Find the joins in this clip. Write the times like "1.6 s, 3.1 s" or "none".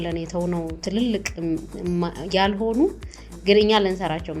none